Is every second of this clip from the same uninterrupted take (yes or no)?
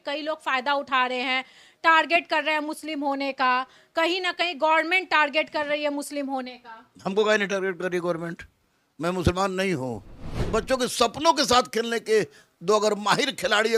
no